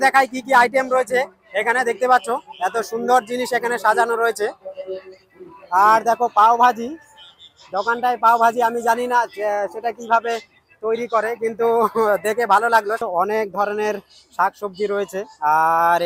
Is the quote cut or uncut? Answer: uncut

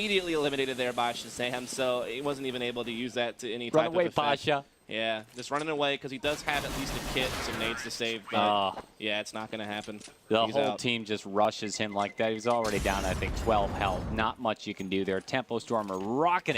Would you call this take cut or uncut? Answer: cut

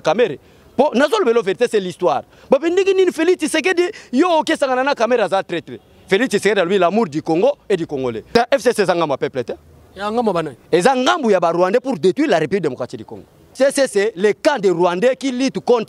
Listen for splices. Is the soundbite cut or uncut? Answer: cut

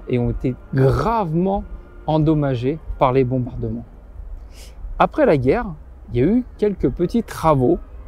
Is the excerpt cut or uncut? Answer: uncut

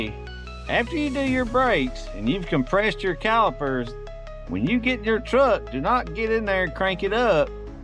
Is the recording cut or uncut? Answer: uncut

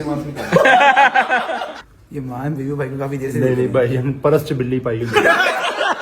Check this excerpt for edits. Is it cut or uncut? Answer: cut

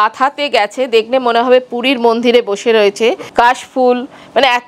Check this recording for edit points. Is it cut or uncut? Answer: cut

